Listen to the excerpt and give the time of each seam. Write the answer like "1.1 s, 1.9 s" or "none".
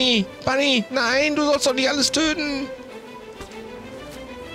none